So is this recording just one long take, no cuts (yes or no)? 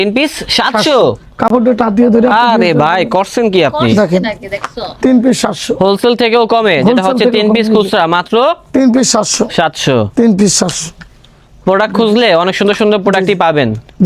yes